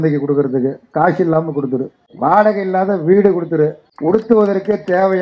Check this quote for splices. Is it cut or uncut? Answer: cut